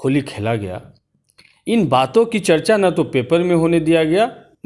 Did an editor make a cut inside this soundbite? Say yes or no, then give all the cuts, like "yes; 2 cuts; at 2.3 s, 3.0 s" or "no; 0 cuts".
no; 0 cuts